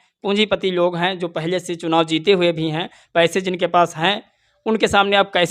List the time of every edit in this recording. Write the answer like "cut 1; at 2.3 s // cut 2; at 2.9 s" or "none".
none

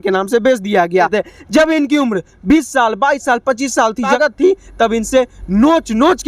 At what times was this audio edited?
cut 1; at 1.1 s // cut 2; at 4.1 s

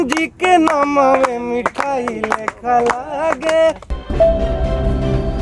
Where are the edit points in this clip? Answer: cut 1; at 4.0 s

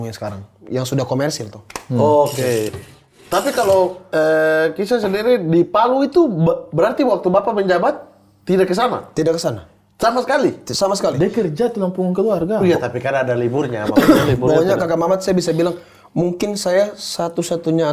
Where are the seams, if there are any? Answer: cut 1; at 2.7 s

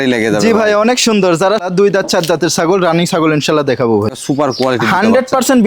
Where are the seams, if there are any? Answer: cut 1; at 1.7 s // cut 2; at 4.2 s

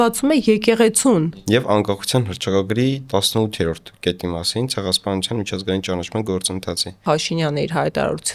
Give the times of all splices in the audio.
cut 1; at 1.3 s // cut 2; at 7.0 s

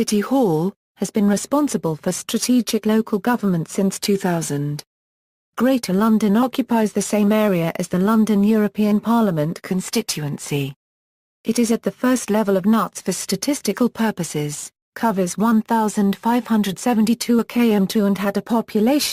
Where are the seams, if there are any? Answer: cut 1; at 1.4 s

